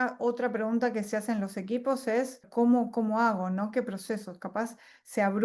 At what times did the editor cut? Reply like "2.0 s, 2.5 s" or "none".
2.5 s